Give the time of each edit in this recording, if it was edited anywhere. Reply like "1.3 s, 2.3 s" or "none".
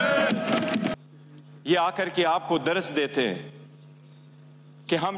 0.9 s